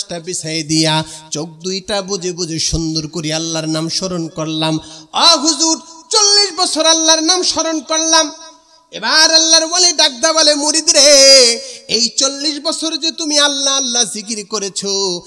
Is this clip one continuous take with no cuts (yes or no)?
yes